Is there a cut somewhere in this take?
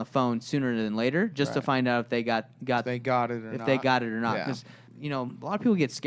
yes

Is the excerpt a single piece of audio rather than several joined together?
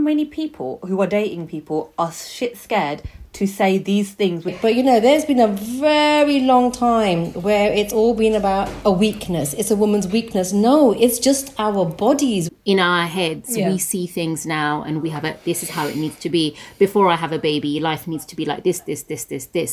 no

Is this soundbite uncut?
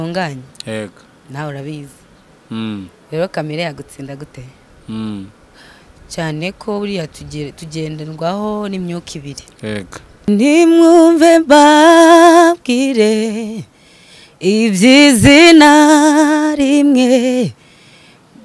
no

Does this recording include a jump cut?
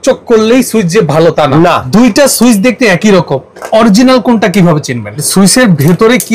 yes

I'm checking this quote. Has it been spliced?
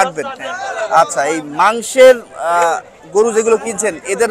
no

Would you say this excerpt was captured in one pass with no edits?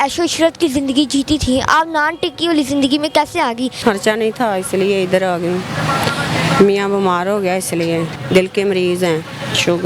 no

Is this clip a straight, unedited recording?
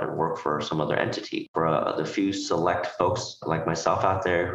no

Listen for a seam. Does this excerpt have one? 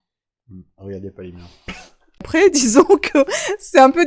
yes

